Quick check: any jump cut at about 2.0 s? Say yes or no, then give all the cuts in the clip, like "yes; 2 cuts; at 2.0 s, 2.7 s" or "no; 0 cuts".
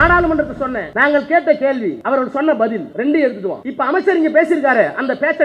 yes; 4 cuts; at 0.9 s, 2.0 s, 2.9 s, 3.6 s